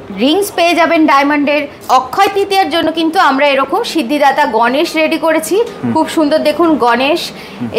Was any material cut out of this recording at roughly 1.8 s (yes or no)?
yes